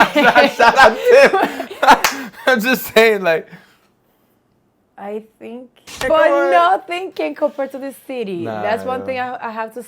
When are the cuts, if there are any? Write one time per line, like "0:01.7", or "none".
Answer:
0:06.0